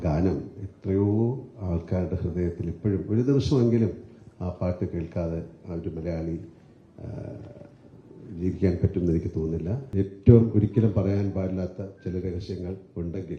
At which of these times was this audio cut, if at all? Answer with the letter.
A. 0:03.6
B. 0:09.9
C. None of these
B